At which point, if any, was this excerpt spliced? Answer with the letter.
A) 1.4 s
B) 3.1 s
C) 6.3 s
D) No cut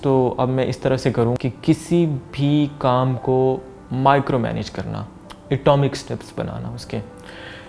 A